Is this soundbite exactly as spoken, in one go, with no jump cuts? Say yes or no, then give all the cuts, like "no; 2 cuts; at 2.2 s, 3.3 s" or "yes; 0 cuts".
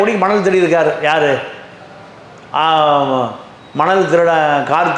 yes; 0 cuts